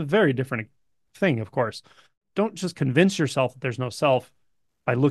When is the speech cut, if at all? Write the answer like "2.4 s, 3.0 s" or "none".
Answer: 2.2 s